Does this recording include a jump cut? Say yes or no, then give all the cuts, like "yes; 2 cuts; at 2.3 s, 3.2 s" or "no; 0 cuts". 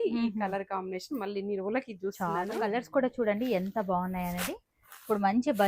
yes; 1 cut; at 2.6 s